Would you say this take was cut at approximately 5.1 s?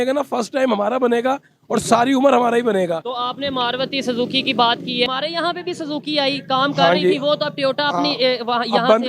yes; 1 cut; at 5.1 s

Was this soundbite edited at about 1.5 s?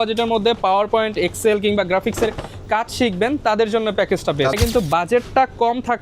no; 1 cut; at 4.5 s

